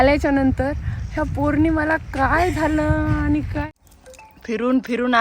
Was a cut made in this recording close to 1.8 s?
no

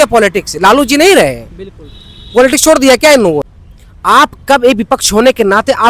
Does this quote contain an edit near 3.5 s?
yes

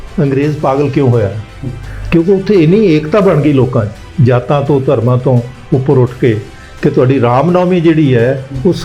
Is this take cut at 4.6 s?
no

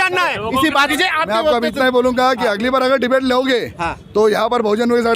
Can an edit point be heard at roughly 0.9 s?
yes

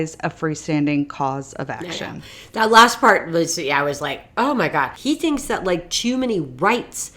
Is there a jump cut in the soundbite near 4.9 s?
yes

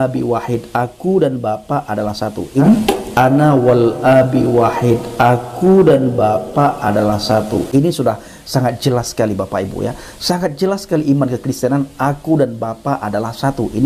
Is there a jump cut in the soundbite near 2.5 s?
no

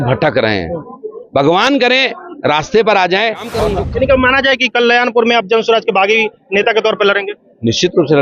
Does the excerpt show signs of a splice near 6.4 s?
no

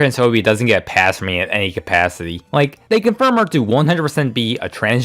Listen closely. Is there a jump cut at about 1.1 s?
no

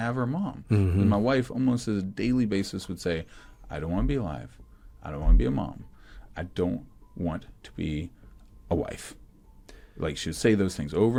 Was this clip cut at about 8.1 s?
no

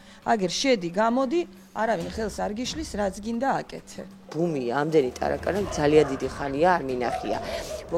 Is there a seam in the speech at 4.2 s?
yes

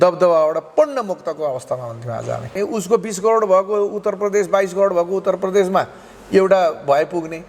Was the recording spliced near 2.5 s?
yes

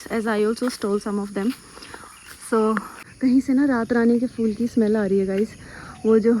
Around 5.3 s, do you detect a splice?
no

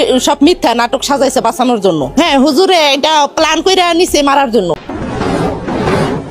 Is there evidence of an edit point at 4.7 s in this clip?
no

